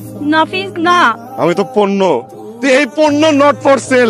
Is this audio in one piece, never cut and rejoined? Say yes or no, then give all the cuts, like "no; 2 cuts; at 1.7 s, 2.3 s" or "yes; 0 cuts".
yes; 0 cuts